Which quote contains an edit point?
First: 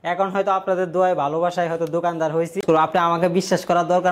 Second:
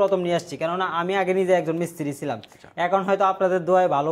first; 1 cut; at 2.6 s

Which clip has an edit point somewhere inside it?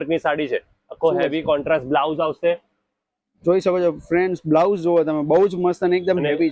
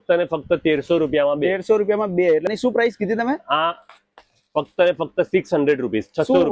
second; 1 cut; at 2.5 s

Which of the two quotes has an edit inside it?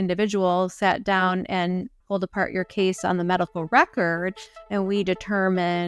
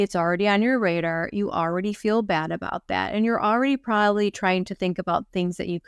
first; 1 cut; at 2.0 s

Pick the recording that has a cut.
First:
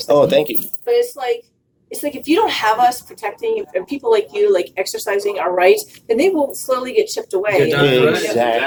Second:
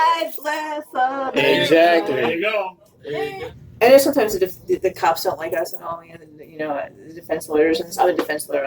second; 1 cut; at 3.3 s

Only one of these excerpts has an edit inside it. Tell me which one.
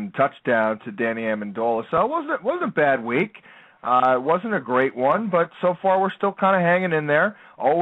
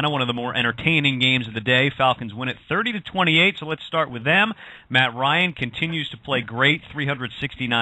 second; 1 cut; at 2.0 s

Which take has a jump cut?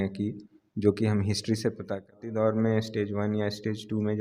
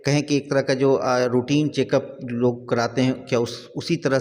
first; 1 cut; at 2.3 s

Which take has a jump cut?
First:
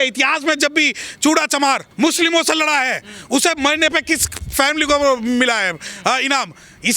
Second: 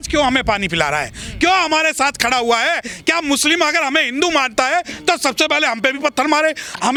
first; 1 cut; at 1.9 s

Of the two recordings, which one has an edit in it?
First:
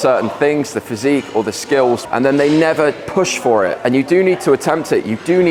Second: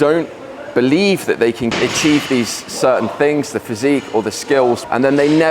second; 1 cut; at 1.7 s

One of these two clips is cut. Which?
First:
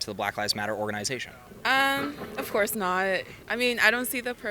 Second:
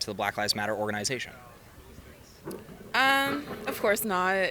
first; 2 cuts; at 1.4 s, 3.3 s

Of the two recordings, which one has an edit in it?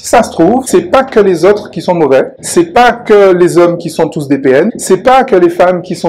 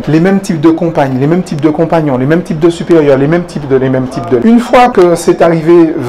second; 1 cut; at 4.4 s

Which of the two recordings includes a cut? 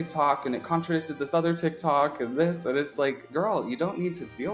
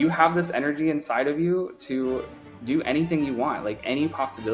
first; 1 cut; at 3.2 s

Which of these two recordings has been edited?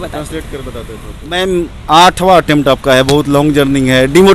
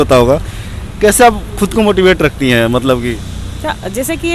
first; 1 cut; at 1.1 s

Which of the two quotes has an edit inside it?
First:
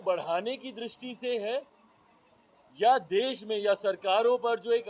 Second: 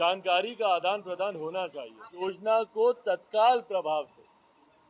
second; 1 cut; at 2.1 s

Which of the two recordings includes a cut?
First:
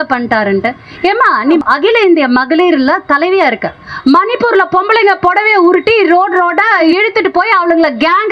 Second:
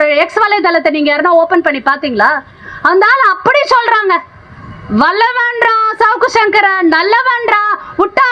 first; 3 cuts; at 1.6 s, 3.9 s, 6.8 s

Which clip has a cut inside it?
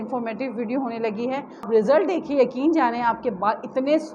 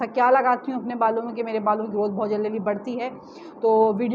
first; 1 cut; at 1.7 s

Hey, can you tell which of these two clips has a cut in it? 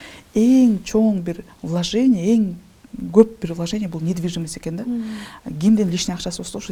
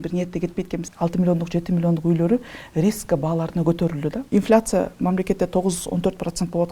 second; 2 cuts; at 0.9 s, 4.2 s

